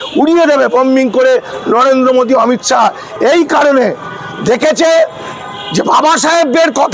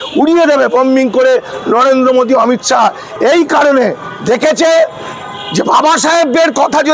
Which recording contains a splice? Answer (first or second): second